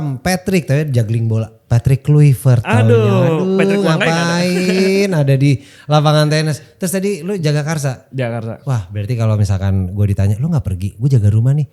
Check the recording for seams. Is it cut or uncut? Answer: uncut